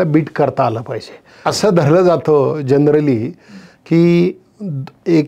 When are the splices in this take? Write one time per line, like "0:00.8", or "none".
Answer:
0:01.4

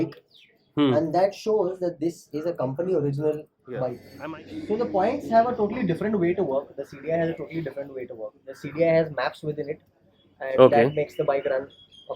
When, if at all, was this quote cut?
0:04.0

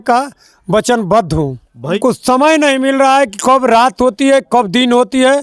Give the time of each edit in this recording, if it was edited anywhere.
0:02.0

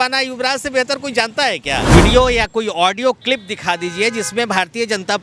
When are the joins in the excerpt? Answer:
0:01.9

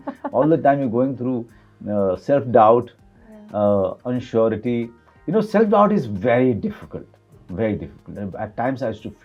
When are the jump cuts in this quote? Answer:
none

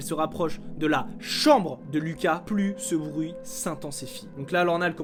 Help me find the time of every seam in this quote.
none

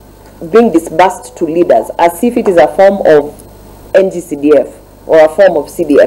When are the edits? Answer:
none

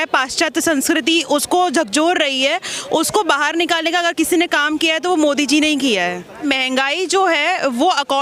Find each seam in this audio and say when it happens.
0:06.3

